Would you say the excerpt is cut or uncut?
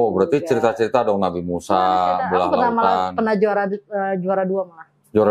uncut